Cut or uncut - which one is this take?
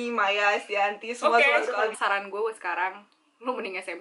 cut